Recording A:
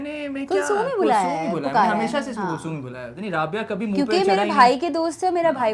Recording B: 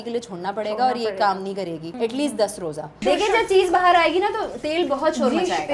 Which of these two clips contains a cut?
B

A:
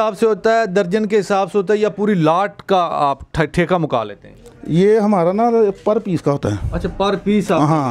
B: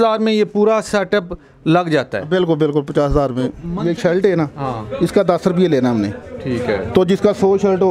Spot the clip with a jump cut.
B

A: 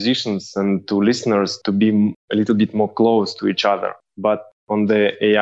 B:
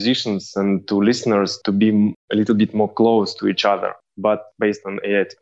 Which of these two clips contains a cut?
B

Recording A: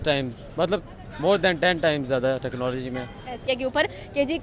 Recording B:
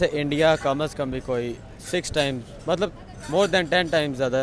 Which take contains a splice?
A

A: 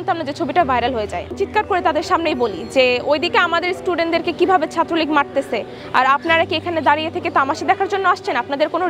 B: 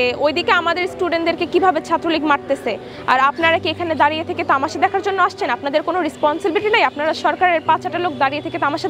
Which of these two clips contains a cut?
A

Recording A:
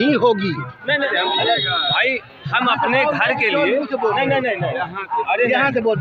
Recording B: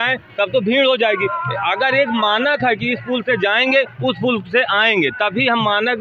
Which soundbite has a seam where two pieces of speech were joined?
A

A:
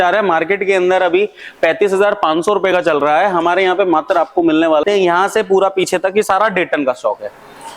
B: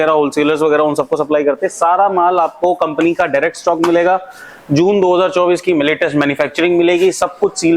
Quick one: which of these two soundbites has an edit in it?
A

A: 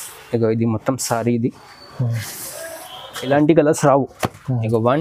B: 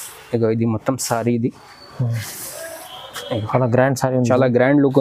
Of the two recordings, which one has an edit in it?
A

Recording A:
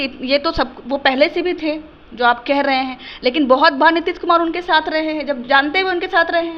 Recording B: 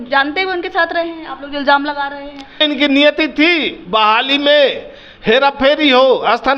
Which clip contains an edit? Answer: B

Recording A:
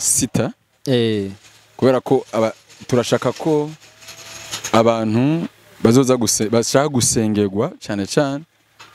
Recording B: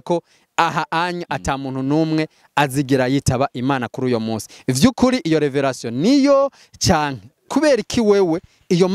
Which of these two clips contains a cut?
B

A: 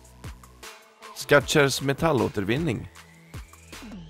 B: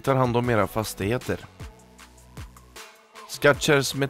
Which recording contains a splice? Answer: A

